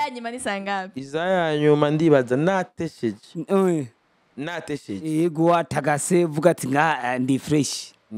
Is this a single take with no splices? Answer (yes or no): yes